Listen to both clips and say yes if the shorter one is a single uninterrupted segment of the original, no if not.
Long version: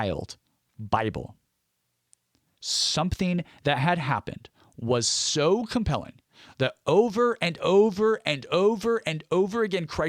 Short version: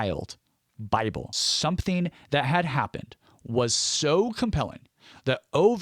no